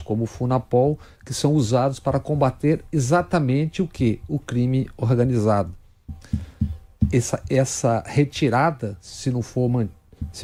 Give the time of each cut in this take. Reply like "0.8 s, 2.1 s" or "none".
none